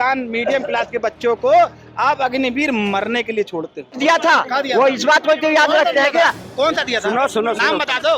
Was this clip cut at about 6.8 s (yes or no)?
no